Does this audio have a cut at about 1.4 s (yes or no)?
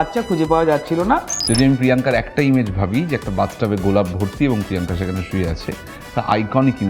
yes